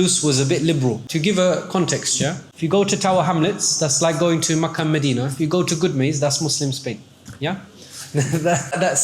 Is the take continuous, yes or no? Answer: no